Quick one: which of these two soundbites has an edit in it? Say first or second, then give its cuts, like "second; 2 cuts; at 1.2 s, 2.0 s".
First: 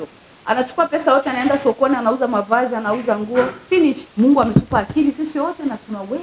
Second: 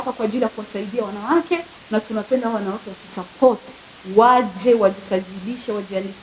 first; 1 cut; at 4.1 s